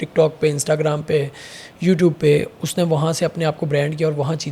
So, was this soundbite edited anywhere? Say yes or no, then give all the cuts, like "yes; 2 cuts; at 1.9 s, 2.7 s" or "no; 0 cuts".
no; 0 cuts